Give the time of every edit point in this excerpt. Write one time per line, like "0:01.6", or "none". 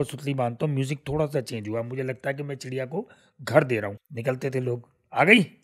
0:04.0